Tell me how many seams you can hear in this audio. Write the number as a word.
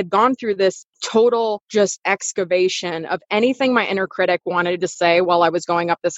two